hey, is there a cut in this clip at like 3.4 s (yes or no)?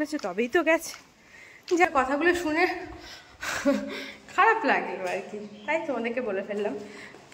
no